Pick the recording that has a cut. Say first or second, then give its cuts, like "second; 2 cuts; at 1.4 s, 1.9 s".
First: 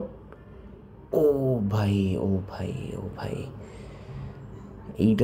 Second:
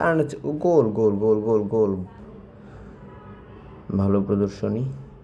second; 1 cut; at 2.1 s